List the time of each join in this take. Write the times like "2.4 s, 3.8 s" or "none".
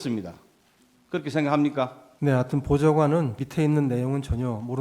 2.0 s, 3.4 s